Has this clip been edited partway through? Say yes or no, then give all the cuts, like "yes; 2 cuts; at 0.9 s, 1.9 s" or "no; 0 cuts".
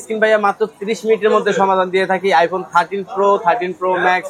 no; 0 cuts